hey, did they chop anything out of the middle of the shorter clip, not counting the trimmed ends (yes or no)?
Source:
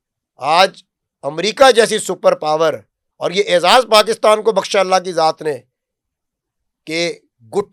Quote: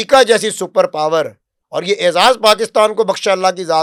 no